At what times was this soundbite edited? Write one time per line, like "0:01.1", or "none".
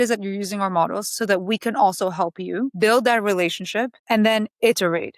0:02.7
0:04.0